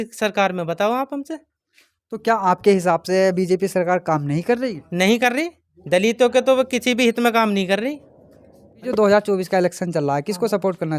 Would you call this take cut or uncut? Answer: cut